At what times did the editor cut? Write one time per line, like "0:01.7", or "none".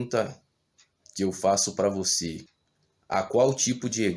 0:02.4